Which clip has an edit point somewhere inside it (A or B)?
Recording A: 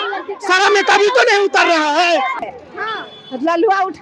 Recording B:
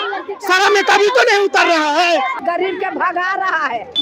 A